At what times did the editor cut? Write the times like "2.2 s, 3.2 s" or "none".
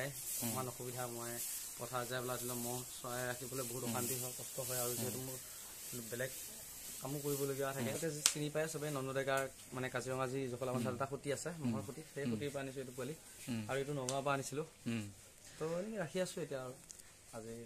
8.0 s